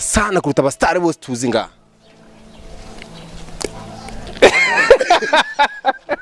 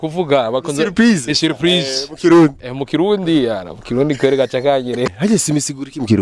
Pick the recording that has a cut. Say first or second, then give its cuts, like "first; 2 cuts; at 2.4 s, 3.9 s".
second; 1 cut; at 5.1 s